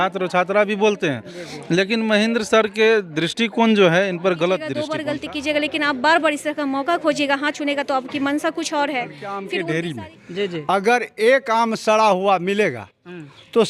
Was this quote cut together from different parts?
yes; 2 cuts; at 4.9 s, 9.4 s

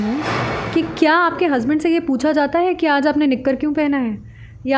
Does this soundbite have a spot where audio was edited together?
no; 0 cuts

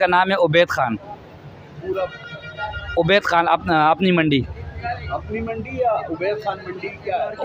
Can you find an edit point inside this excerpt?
no; 0 cuts

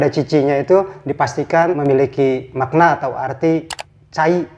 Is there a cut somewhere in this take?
yes; 1 cut; at 1.8 s

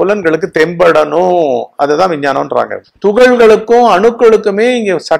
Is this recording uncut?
no; 1 cut; at 2.8 s

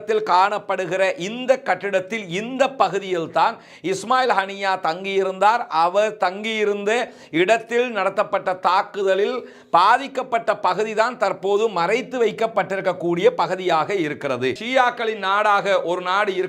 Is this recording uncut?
no; 1 cut; at 14.6 s

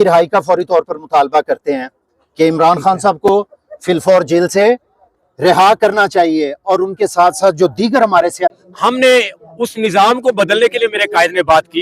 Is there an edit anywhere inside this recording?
yes; 1 cut; at 8.6 s

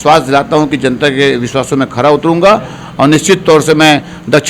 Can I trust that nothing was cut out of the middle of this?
yes; 0 cuts

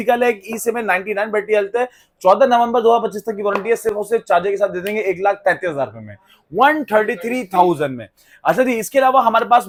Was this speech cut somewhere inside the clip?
no; 0 cuts

